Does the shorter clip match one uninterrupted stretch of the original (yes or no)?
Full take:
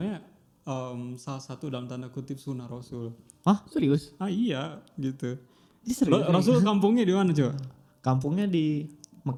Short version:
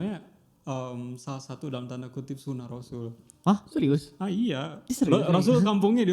no